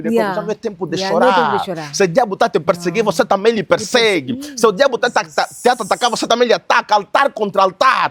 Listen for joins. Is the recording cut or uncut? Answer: uncut